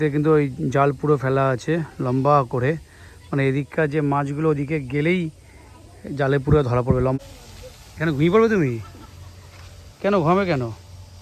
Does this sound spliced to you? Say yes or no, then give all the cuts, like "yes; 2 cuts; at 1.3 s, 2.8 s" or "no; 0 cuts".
yes; 1 cut; at 7.2 s